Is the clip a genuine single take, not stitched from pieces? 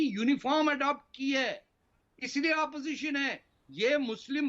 yes; 0 cuts

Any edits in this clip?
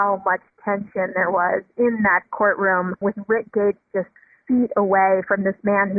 no; 0 cuts

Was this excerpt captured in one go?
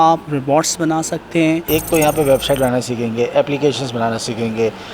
no; 1 cut; at 1.6 s

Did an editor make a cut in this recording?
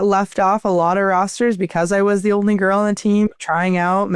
no; 0 cuts

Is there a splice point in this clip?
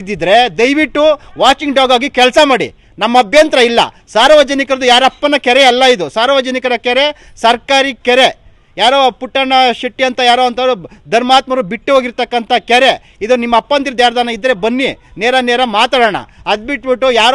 no; 0 cuts

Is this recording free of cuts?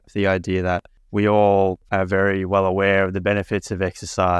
no; 2 cuts; at 1.0 s, 1.8 s

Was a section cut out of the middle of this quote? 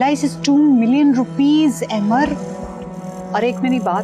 no; 0 cuts

